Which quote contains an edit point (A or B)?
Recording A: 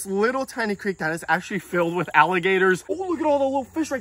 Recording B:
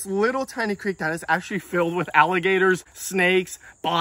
A